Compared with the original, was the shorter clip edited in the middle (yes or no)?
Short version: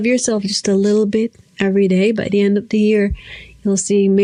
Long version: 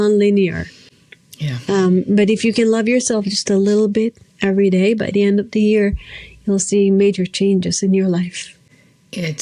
no